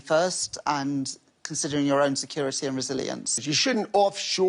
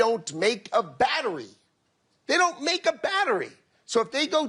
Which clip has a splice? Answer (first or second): first